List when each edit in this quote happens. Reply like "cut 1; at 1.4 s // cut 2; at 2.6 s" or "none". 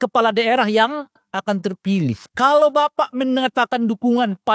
cut 1; at 2.3 s